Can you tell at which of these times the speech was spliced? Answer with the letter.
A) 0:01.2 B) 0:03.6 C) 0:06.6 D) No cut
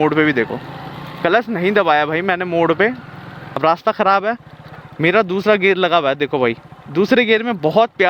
B